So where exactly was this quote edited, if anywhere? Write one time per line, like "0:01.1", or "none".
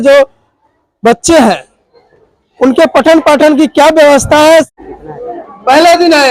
0:04.7

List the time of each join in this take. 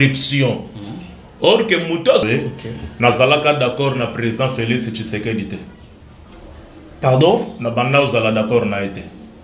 0:02.2

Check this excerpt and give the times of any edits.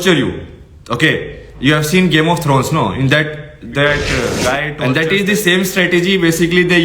0:04.7

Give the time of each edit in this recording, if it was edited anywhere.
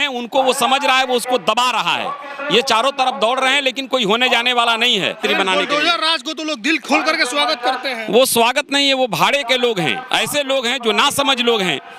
0:05.2
0:10.0

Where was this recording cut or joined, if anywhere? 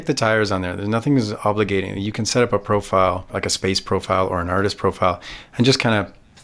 0:03.3

